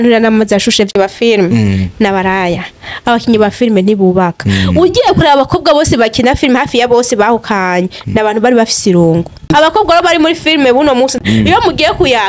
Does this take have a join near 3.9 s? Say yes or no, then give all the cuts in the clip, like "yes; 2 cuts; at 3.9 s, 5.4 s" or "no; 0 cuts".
no; 3 cuts; at 0.9 s, 9.5 s, 11.1 s